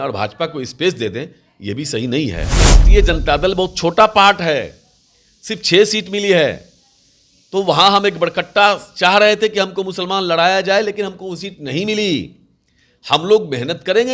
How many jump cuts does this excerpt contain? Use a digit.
1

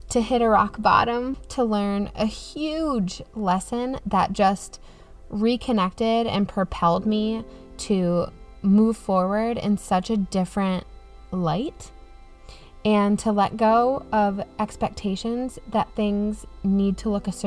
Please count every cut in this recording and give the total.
1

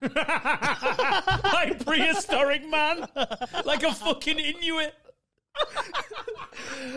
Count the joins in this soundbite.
0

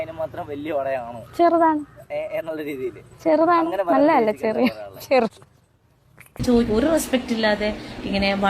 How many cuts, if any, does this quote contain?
1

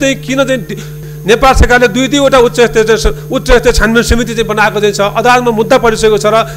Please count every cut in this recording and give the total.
1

